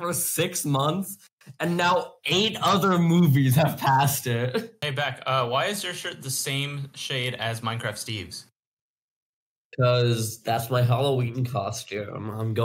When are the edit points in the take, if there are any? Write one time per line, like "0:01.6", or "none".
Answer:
0:04.8